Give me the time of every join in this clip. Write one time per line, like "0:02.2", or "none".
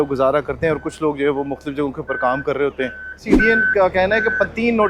0:03.3